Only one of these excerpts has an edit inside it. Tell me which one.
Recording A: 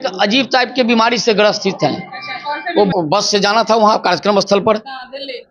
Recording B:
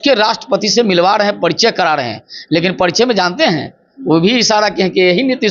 A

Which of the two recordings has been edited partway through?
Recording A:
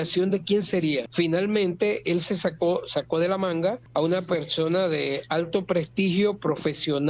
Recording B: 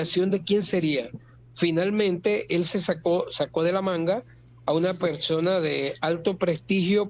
A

